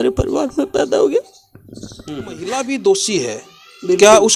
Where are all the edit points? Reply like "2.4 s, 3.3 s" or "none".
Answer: 2.5 s

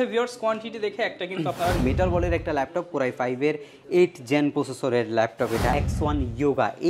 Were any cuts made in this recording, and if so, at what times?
1.8 s, 5.7 s

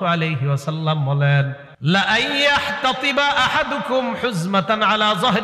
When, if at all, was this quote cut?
1.6 s

